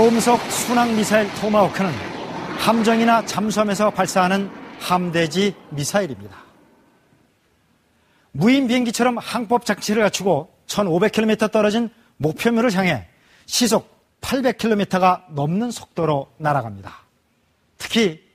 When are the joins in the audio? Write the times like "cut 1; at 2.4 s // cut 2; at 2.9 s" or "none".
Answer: none